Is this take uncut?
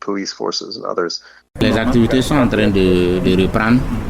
no; 1 cut; at 1.4 s

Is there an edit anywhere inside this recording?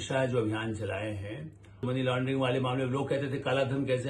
yes; 1 cut; at 1.8 s

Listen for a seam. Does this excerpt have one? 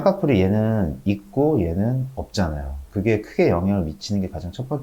no; 0 cuts

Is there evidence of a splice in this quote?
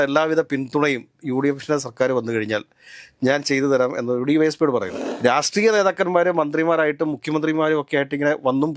yes; 1 cut; at 5.0 s

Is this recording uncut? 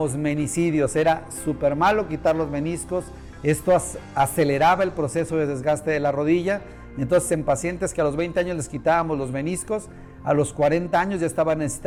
yes; 0 cuts

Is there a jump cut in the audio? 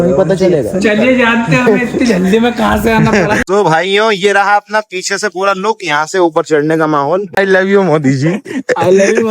yes; 2 cuts; at 3.4 s, 7.3 s

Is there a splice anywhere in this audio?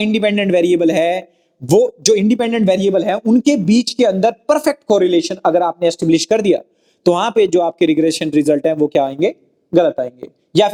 no; 0 cuts

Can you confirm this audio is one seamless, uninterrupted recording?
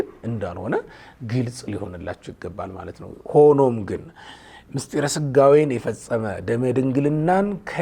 yes; 0 cuts

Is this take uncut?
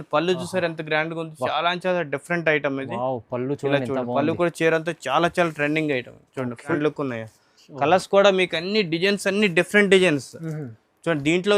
no; 1 cut; at 6.8 s

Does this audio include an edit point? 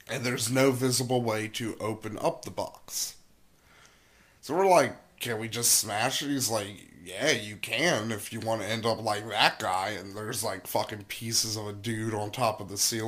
no; 0 cuts

